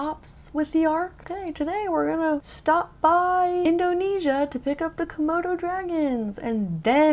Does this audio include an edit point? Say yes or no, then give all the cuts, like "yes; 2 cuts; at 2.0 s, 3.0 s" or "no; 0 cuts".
yes; 3 cuts; at 1.2 s, 2.5 s, 3.6 s